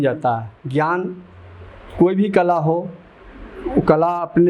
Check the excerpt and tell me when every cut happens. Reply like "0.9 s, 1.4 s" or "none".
none